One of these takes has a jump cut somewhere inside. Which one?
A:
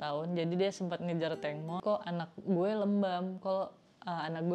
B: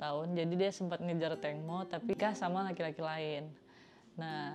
A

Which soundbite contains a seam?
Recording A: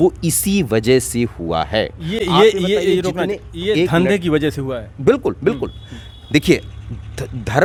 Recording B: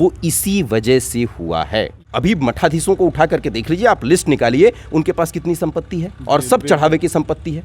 B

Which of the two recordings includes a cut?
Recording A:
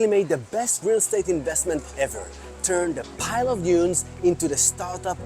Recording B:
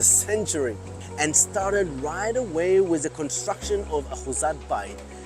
B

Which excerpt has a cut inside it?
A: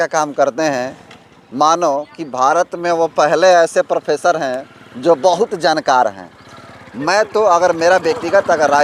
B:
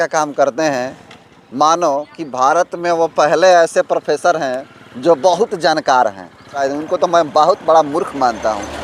B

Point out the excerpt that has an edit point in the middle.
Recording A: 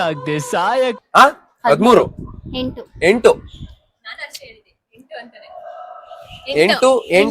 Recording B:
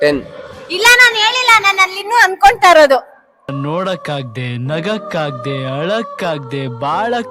A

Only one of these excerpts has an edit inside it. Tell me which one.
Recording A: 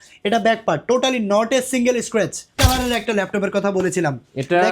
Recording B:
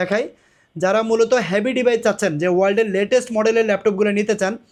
A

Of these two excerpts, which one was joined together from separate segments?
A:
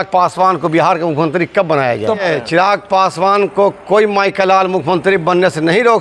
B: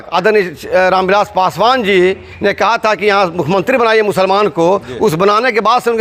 A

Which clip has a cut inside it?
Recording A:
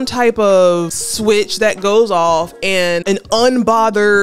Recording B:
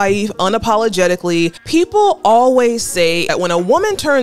B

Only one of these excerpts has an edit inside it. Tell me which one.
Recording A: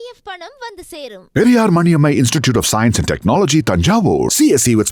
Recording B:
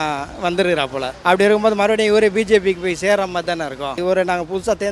B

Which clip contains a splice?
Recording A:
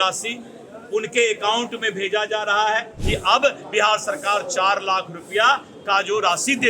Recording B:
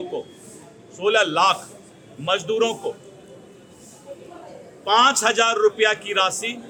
A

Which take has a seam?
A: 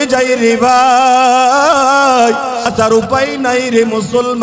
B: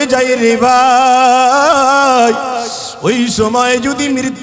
A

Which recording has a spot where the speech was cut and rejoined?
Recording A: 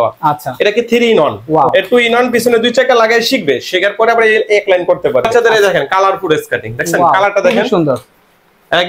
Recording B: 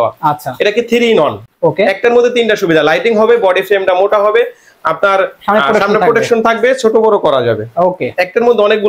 A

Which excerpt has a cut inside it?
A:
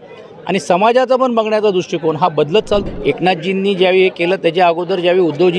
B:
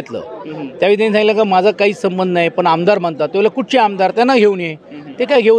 A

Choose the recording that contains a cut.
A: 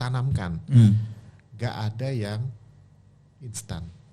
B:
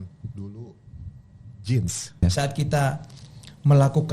B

